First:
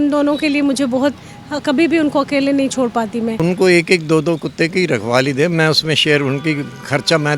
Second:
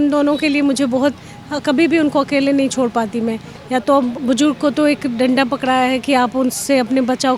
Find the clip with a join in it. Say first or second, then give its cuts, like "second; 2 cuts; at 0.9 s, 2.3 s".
first; 1 cut; at 3.4 s